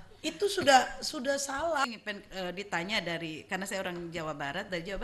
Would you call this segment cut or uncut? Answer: cut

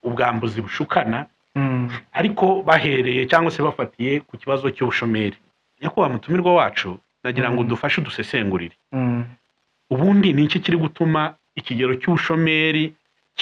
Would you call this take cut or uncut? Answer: cut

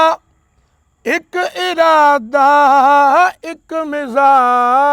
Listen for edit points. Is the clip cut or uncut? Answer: uncut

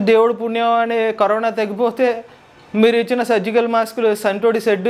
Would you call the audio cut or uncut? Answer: uncut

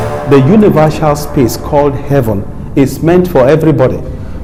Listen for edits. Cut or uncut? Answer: uncut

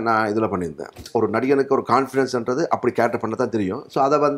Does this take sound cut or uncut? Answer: cut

